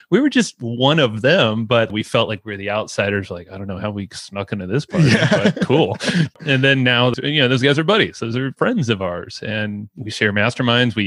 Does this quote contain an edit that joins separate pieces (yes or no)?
yes